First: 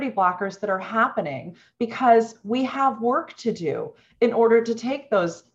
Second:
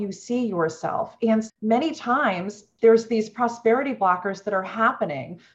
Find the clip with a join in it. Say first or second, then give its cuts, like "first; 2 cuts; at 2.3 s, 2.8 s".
second; 2 cuts; at 1.5 s, 2.7 s